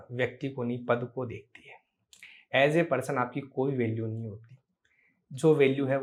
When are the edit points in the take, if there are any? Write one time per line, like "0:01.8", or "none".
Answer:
none